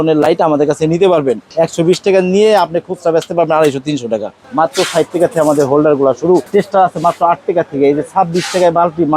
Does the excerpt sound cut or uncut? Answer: cut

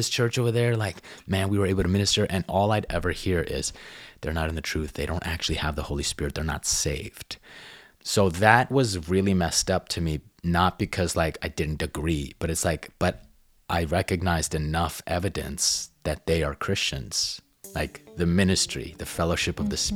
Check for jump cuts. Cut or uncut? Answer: uncut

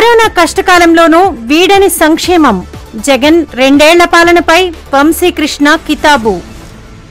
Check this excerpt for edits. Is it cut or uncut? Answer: uncut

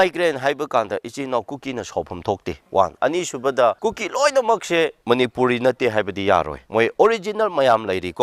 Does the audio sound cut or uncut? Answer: cut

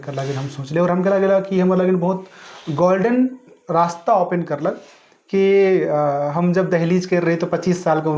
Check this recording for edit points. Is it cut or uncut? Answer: uncut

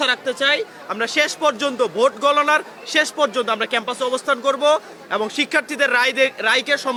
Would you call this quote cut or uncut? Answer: uncut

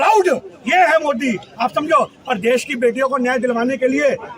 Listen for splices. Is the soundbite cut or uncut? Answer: uncut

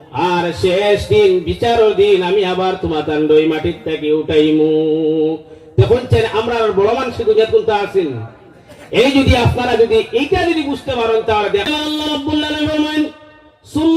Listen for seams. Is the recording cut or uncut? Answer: cut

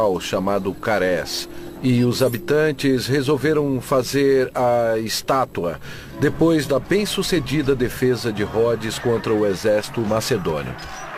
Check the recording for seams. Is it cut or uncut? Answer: uncut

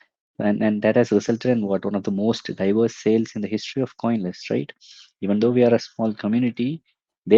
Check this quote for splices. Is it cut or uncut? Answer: uncut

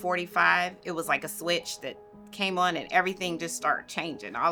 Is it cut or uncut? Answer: uncut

